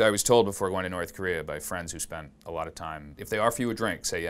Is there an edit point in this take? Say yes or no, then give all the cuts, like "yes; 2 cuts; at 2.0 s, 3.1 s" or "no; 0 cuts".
yes; 1 cut; at 3.2 s